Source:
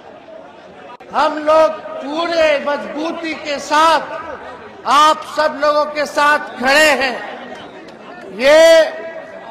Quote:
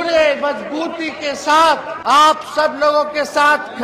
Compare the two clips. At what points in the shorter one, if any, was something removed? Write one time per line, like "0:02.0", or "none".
0:02.4

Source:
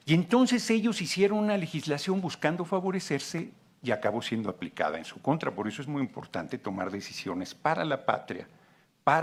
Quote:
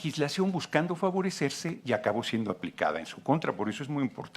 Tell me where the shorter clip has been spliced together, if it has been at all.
0:01.7

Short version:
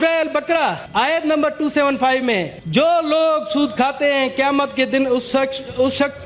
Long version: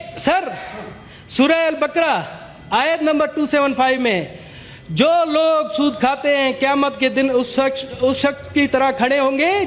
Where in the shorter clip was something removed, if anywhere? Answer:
0:00.8
0:02.6

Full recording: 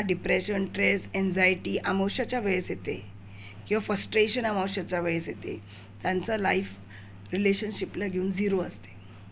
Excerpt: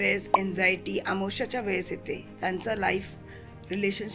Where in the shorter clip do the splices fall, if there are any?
0:02.3

